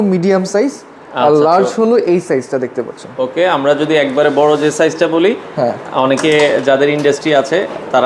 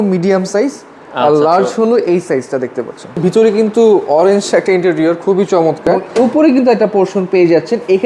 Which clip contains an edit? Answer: second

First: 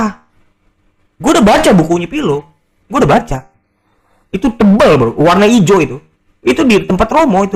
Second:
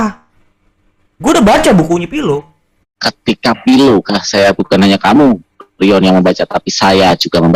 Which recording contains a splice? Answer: second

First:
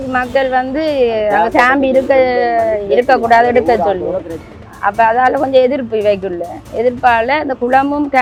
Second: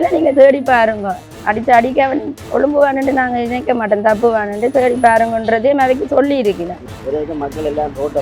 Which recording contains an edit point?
second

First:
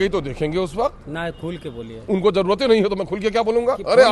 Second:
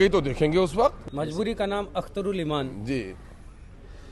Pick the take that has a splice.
second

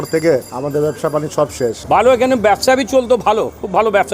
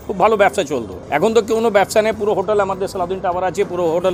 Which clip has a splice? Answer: first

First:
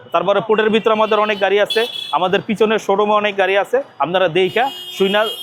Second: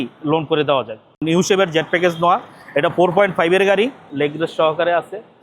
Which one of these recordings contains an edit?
second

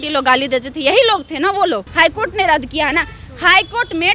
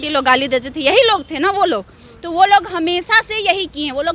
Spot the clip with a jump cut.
first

